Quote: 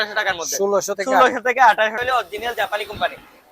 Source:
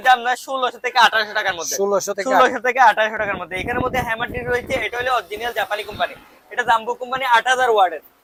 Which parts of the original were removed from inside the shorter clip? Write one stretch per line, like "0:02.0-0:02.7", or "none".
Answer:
0:03.1-0:04.9